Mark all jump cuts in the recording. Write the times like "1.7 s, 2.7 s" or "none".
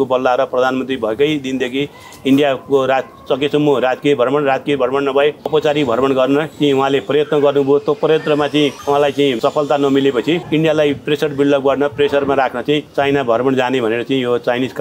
5.5 s, 6.5 s, 9.2 s, 10.4 s, 12.9 s